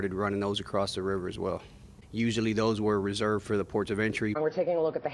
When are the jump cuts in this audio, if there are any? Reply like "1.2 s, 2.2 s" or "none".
none